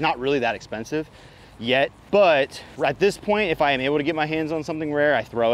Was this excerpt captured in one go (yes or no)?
no